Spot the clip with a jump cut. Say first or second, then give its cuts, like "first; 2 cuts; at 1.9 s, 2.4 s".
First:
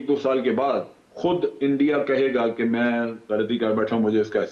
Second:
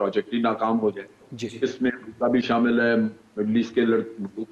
first; 1 cut; at 1.0 s